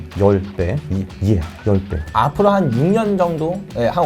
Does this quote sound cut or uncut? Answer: cut